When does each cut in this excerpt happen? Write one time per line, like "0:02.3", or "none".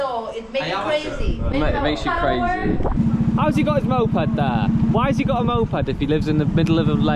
0:03.0
0:04.7